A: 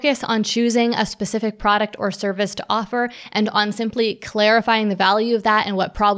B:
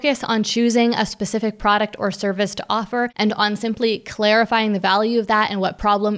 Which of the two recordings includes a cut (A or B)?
B